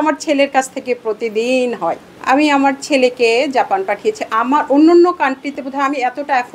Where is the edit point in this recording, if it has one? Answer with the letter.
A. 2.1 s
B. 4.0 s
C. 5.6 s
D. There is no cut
A